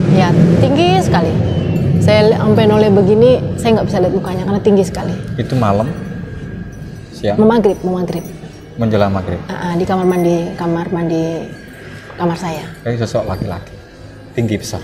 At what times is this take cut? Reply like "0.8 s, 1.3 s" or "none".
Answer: none